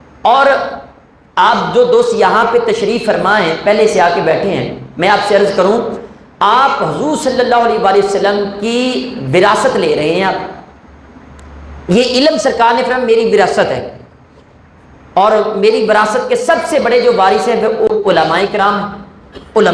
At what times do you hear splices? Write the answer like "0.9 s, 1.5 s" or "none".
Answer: 17.9 s